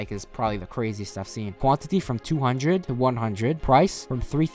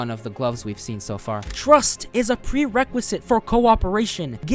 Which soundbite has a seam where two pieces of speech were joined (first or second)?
second